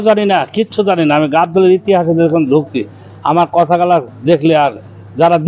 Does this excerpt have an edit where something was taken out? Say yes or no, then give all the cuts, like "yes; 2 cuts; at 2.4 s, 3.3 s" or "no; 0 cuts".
no; 0 cuts